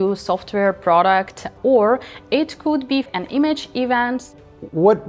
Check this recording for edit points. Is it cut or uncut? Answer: cut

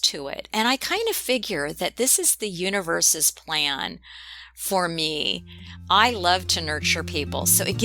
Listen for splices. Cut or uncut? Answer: uncut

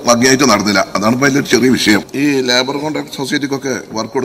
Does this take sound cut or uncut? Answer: cut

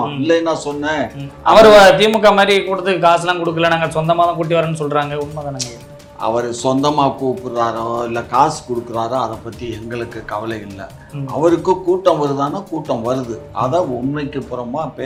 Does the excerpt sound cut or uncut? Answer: uncut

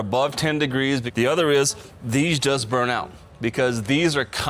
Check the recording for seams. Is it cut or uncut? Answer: cut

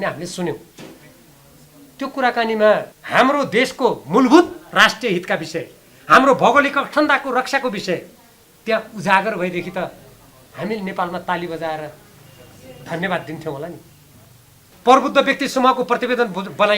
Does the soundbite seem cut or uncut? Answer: cut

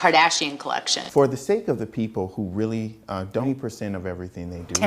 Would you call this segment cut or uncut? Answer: cut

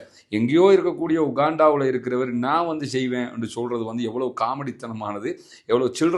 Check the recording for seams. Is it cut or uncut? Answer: uncut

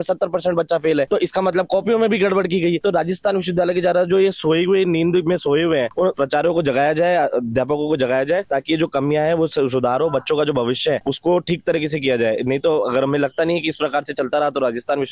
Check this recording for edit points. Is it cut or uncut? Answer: uncut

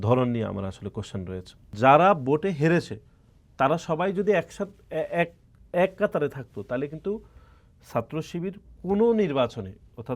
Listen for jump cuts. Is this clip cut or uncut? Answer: cut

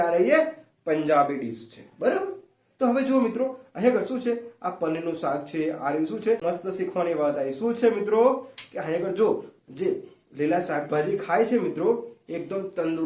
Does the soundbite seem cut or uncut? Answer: cut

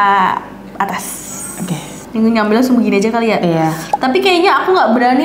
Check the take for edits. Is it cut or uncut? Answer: uncut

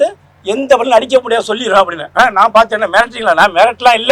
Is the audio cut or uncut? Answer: uncut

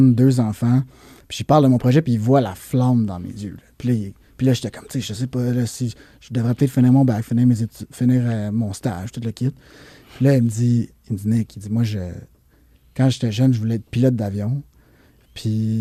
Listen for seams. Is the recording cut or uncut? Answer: uncut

